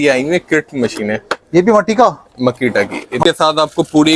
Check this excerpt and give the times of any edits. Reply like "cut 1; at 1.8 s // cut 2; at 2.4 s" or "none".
cut 1; at 3.2 s